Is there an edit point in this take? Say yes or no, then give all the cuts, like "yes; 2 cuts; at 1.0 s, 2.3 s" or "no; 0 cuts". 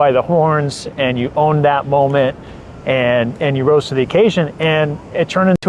no; 0 cuts